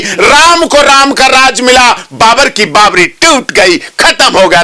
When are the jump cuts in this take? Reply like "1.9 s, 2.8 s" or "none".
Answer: none

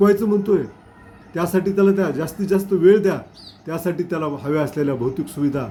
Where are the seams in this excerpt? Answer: none

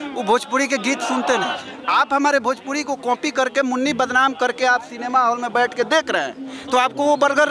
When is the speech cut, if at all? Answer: 1.7 s

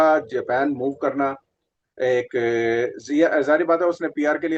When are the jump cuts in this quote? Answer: none

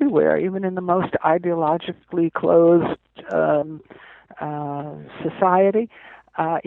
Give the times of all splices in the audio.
none

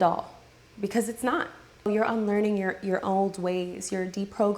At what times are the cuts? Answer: 1.9 s

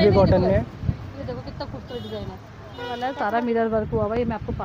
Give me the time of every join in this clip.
3.0 s

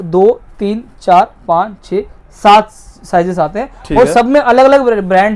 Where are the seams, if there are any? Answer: none

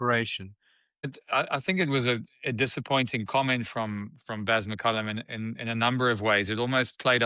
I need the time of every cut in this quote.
1.1 s

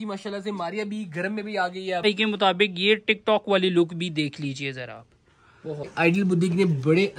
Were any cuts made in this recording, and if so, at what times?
2.0 s, 5.9 s

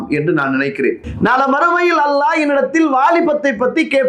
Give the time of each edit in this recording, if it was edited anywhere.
1.0 s

